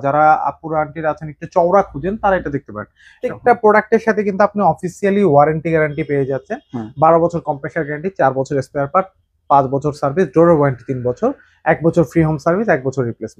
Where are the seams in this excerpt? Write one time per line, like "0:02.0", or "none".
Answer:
0:03.3